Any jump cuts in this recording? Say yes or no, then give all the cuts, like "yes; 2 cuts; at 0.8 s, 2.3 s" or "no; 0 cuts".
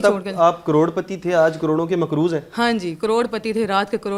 no; 0 cuts